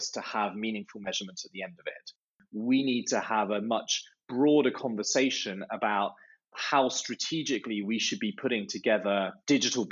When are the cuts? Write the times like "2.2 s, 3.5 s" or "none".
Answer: 2.4 s